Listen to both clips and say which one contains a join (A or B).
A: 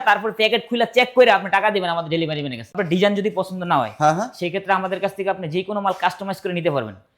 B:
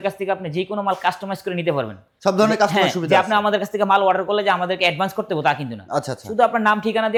A